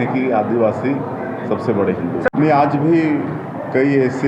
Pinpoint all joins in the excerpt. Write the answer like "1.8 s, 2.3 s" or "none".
none

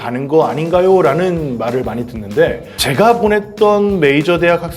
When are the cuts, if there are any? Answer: 2.7 s

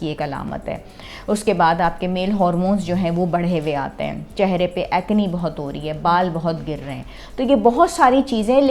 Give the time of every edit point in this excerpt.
none

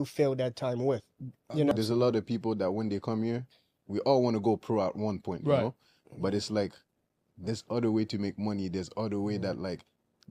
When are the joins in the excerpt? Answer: 1.7 s

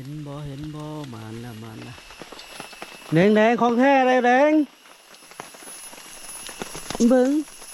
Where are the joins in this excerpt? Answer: none

